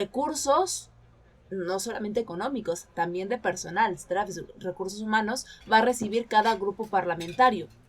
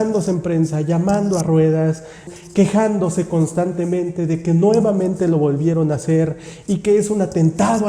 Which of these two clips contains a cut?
second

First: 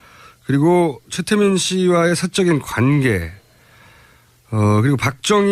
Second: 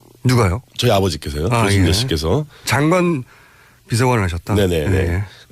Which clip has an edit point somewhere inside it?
second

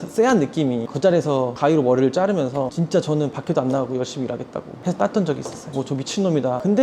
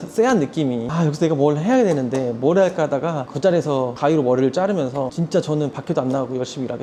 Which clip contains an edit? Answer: first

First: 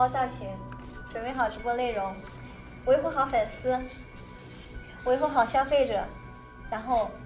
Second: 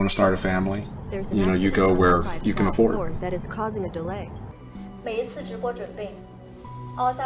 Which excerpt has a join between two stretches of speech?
second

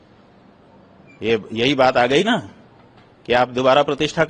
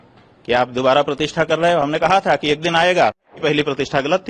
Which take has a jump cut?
second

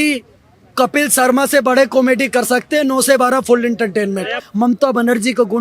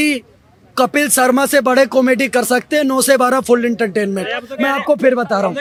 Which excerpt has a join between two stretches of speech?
first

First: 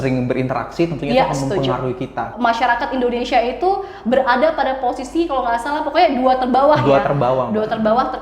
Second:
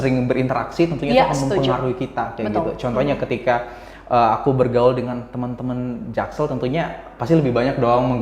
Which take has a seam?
first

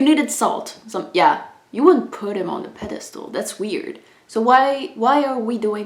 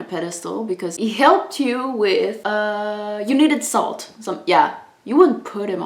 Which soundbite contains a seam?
second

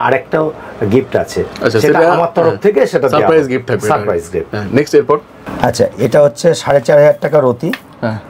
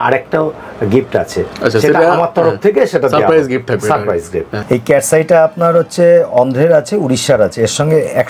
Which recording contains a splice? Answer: second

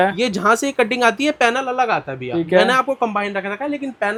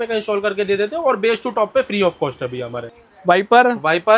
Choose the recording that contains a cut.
second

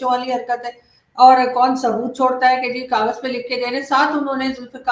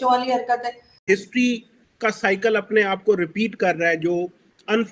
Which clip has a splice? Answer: second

